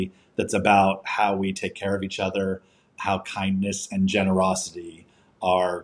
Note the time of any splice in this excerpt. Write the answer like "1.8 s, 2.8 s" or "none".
none